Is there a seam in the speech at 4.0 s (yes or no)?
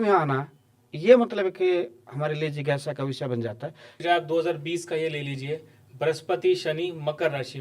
yes